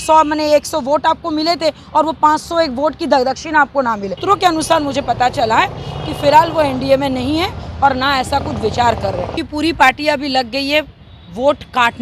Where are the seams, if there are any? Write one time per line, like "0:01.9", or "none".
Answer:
0:04.2
0:09.4